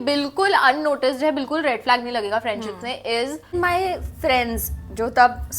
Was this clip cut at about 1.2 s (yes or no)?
no